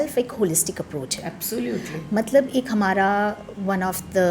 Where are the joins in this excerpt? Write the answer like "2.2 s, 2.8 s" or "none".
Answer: none